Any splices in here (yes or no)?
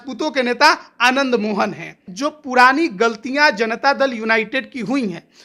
yes